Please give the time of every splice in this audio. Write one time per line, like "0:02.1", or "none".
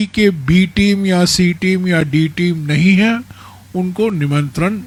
none